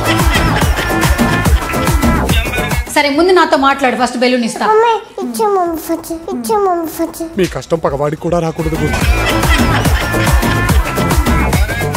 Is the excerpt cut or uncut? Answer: cut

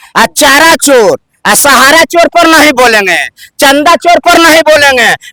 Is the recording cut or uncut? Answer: uncut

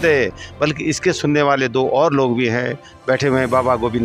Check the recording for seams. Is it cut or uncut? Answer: uncut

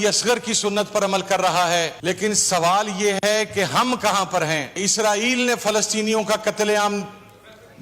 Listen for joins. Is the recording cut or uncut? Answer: cut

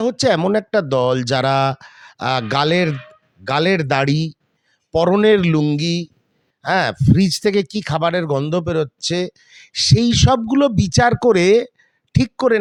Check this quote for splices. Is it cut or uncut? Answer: uncut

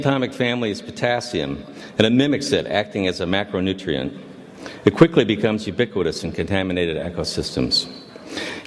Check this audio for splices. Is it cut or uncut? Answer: cut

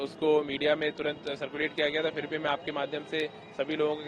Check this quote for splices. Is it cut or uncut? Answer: uncut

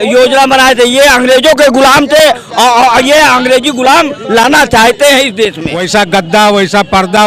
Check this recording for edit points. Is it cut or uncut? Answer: cut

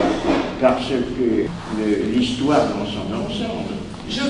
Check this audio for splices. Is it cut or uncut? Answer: cut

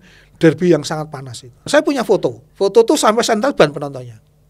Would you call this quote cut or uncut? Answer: cut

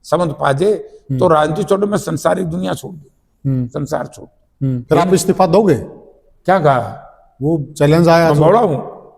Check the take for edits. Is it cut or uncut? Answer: cut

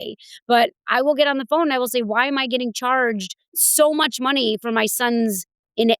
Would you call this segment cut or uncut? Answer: cut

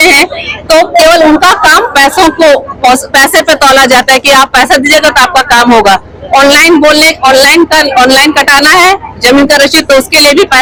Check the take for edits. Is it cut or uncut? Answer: uncut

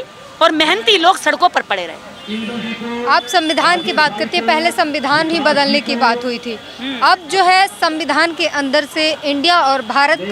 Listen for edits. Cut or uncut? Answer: uncut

